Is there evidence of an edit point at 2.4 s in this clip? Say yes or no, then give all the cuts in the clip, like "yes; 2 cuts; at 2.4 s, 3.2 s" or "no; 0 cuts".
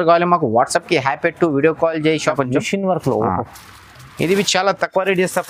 yes; 1 cut; at 2.4 s